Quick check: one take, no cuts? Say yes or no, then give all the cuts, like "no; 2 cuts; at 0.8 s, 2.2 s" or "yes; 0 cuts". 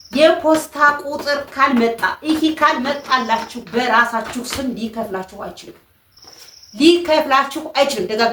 yes; 0 cuts